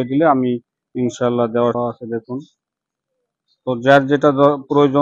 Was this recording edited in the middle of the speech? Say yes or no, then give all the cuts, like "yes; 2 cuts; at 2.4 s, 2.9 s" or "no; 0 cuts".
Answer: yes; 1 cut; at 1.8 s